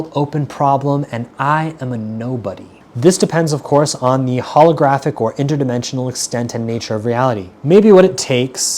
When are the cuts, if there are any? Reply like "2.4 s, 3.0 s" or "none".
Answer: 2.8 s, 7.5 s